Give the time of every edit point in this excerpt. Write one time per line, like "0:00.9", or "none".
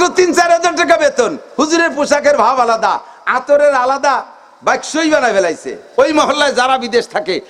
none